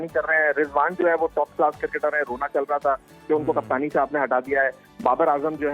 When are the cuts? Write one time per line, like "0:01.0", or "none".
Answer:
none